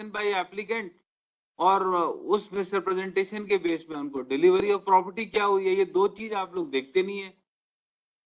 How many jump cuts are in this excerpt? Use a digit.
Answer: 0